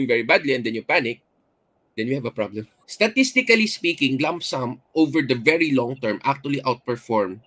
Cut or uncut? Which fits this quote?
cut